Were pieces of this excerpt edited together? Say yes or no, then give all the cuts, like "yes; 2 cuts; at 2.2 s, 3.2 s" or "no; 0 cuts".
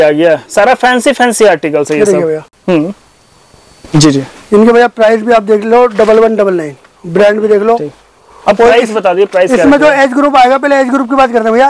no; 0 cuts